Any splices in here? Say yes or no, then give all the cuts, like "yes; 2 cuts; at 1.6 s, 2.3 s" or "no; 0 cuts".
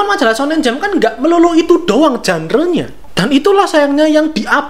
yes; 1 cut; at 3.0 s